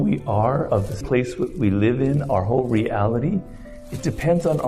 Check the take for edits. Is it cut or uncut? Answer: cut